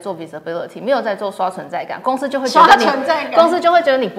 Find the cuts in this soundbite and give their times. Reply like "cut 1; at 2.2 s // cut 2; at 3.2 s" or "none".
none